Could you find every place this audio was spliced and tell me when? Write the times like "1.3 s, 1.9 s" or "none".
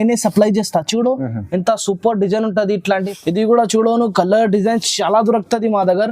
3.1 s